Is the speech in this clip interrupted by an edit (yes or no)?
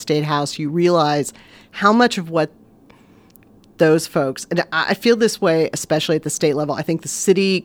no